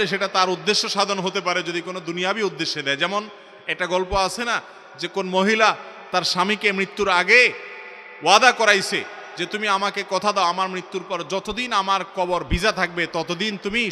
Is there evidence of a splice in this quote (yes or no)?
no